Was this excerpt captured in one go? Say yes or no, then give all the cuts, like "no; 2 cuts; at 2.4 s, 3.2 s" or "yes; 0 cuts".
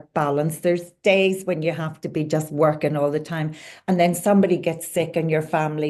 yes; 0 cuts